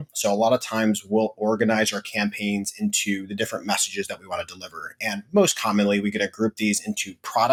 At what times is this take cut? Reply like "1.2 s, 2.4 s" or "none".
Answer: none